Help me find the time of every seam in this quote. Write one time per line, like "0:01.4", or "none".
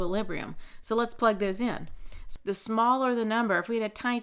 0:02.2

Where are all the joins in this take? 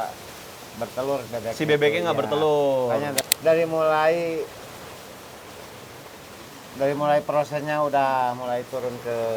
0:03.2

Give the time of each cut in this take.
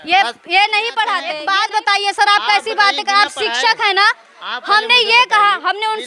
0:01.4

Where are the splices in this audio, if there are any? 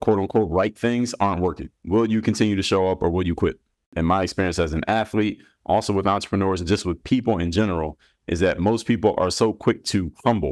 0:01.7
0:03.9

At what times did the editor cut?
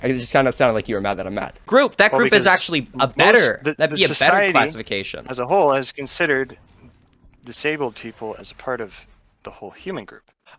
0:01.7

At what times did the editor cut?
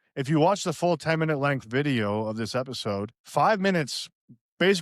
0:03.2

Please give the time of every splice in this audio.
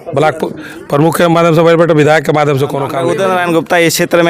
0:02.9

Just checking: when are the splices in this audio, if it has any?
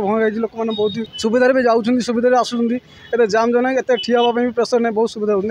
0:01.1

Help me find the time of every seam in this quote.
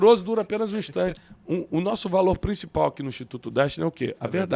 0:01.3

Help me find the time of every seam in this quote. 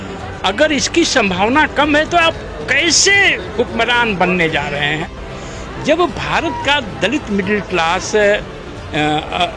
0:05.0

